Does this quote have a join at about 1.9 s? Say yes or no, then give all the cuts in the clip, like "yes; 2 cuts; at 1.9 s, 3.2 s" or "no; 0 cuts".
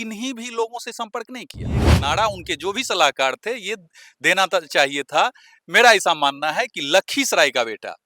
yes; 1 cut; at 1.9 s